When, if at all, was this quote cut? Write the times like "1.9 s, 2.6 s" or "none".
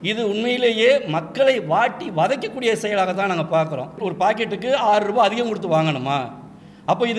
4.0 s